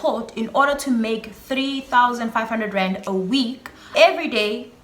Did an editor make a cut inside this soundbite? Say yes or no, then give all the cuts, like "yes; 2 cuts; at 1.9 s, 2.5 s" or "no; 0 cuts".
yes; 1 cut; at 3.9 s